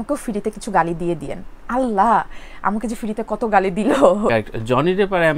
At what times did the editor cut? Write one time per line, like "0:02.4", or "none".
0:04.3